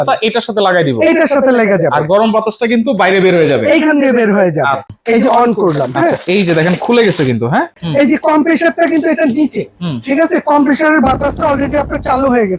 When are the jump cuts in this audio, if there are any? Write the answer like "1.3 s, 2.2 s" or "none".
4.9 s, 7.8 s